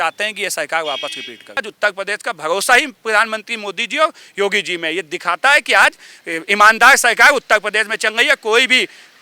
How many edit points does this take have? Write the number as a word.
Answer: one